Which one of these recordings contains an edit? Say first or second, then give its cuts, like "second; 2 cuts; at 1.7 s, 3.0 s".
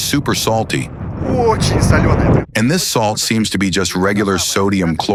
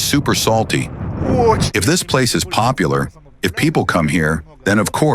second; 1 cut; at 1.6 s